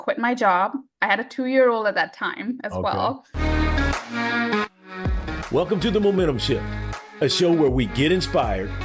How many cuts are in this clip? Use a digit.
1